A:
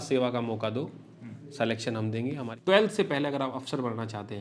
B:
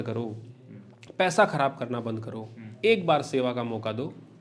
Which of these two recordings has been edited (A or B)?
A